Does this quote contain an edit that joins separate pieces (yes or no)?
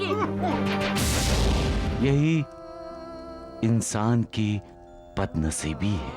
yes